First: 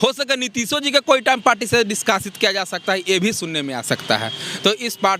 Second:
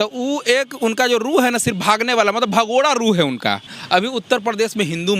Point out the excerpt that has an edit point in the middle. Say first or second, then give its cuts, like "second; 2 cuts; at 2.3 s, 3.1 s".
second; 1 cut; at 3.7 s